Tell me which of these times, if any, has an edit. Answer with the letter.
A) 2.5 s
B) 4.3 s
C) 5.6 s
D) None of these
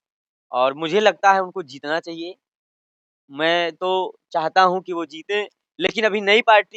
D